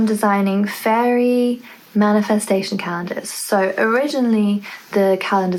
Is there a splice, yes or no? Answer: no